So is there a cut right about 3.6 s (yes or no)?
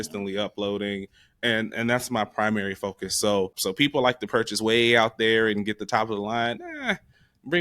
yes